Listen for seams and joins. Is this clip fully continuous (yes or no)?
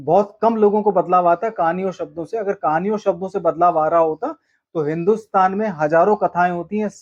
yes